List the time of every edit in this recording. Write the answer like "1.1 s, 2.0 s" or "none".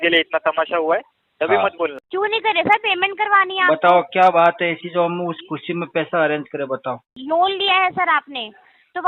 2.0 s, 7.1 s